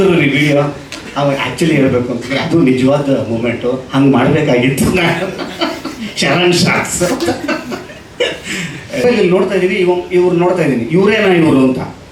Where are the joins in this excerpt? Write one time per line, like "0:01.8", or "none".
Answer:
0:09.0